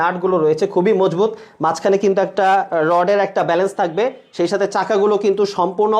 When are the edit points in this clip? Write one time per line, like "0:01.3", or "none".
none

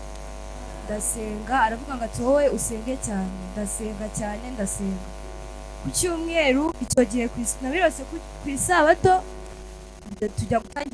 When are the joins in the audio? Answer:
0:09.4

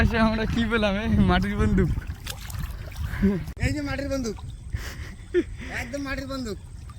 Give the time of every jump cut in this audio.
0:03.5

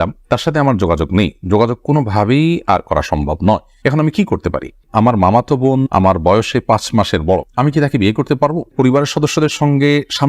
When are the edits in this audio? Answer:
0:04.9
0:08.7

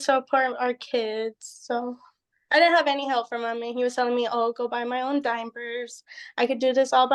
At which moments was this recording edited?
none

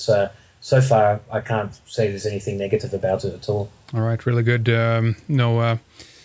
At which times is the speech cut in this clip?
0:04.2

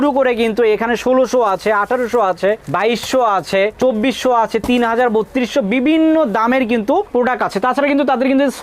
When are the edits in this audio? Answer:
none

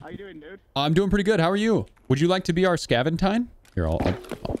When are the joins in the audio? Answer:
0:03.6

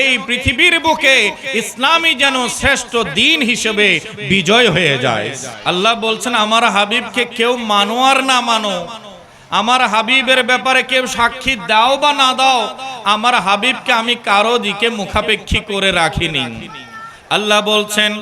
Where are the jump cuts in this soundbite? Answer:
0:05.4

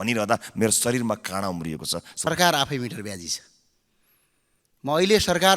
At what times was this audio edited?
0:02.3

